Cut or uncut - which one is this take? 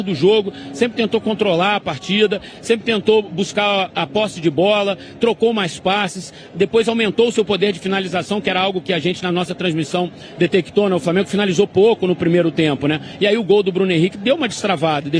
uncut